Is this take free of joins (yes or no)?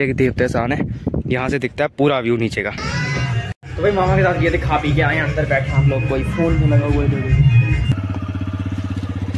no